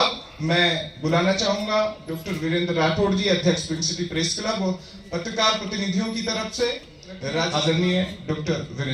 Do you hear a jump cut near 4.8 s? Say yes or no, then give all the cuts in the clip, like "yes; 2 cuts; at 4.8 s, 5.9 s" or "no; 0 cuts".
no; 1 cut; at 7.5 s